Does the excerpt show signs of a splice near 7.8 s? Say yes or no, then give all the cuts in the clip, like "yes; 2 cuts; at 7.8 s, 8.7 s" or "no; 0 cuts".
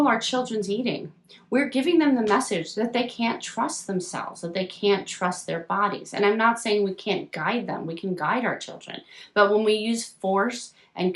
no; 0 cuts